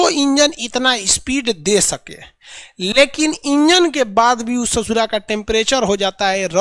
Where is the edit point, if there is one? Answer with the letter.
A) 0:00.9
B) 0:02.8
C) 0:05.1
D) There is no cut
D